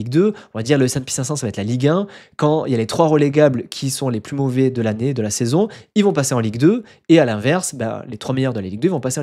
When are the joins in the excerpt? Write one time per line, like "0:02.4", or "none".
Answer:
none